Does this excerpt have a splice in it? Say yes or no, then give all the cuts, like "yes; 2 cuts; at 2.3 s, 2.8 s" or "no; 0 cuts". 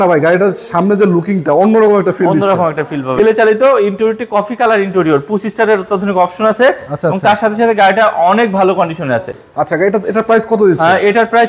yes; 2 cuts; at 3.1 s, 9.4 s